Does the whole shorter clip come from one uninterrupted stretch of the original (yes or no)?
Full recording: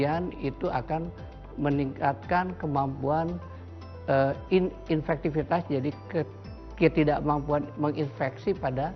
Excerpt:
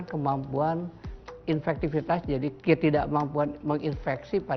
no